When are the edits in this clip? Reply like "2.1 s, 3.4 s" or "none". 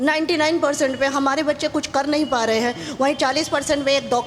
none